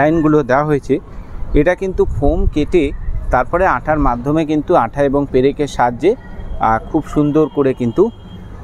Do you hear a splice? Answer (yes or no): no